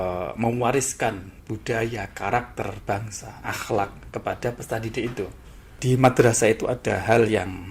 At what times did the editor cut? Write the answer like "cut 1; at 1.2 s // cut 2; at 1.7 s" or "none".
cut 1; at 5.8 s